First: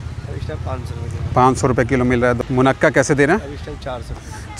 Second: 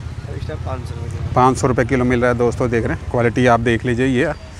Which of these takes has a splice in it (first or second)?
first